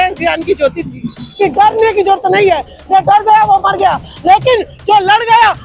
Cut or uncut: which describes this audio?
cut